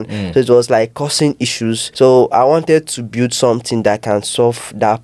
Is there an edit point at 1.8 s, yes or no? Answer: yes